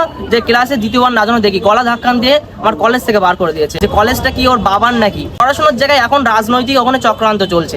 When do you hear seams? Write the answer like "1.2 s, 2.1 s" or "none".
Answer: 3.7 s, 5.4 s